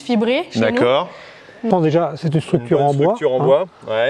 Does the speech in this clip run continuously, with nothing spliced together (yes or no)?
no